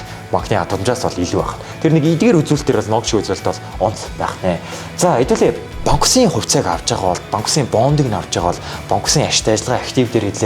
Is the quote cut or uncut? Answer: cut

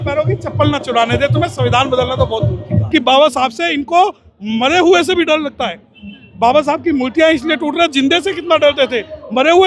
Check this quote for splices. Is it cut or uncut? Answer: cut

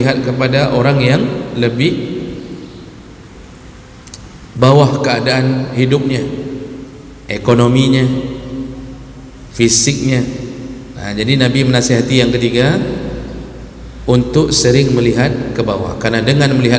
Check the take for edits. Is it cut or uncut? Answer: uncut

